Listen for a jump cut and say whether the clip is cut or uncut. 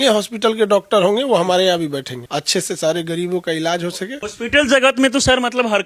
cut